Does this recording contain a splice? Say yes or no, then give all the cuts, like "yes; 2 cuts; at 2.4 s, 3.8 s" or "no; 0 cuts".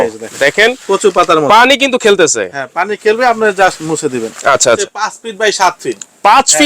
yes; 1 cut; at 4.8 s